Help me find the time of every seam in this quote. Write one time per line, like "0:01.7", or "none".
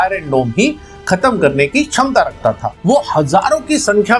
0:02.7